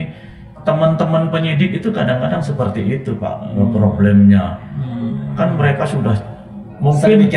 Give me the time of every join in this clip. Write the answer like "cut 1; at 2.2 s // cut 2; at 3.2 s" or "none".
none

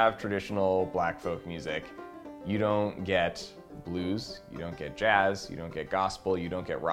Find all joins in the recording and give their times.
none

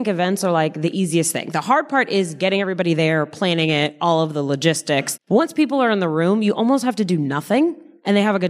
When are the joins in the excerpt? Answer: cut 1; at 5.1 s

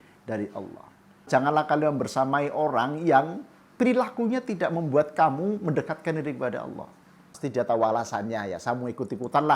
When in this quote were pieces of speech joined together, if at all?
cut 1; at 1.3 s // cut 2; at 7.4 s

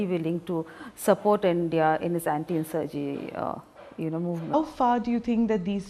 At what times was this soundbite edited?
none

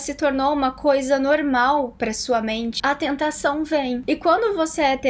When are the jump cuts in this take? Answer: cut 1; at 2.7 s // cut 2; at 4.0 s

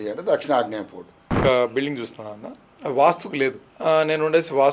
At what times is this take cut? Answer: cut 1; at 1.3 s // cut 2; at 3.7 s

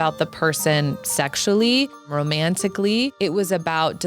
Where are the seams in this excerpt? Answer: cut 1; at 2.0 s // cut 2; at 3.1 s

